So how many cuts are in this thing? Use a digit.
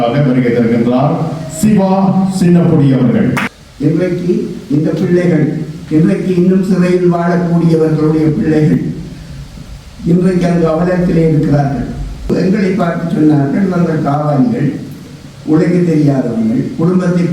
2